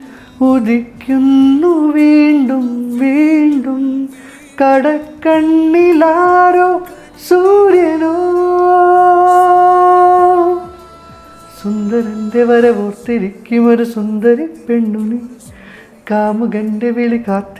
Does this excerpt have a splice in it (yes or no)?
no